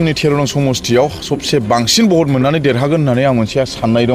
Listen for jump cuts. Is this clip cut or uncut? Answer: uncut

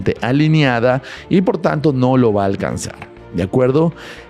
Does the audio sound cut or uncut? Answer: uncut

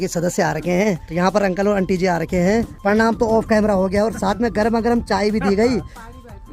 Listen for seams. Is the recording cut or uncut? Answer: uncut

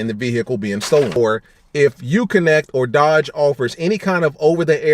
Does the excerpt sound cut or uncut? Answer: cut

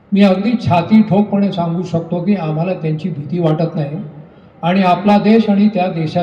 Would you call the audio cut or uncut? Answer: uncut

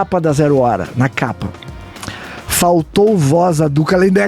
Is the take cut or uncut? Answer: uncut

